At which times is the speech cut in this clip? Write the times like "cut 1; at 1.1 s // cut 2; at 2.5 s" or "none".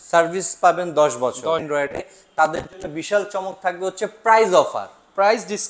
cut 1; at 1.6 s

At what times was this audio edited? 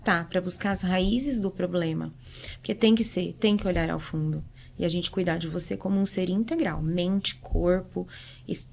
none

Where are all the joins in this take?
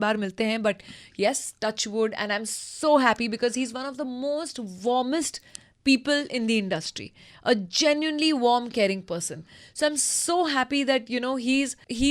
none

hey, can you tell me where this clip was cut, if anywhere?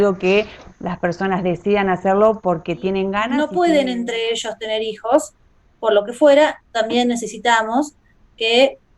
cut 1; at 3.4 s

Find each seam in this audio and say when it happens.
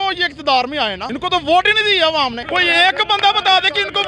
cut 1; at 1.0 s // cut 2; at 2.4 s

